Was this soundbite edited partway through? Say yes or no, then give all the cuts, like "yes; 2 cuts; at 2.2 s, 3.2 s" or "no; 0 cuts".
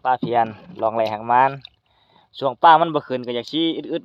no; 0 cuts